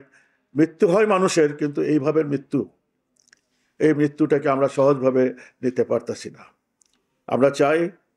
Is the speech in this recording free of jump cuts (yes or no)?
yes